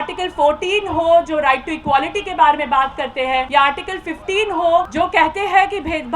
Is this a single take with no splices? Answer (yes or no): no